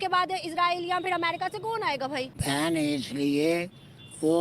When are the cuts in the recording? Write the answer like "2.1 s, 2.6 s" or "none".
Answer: 2.3 s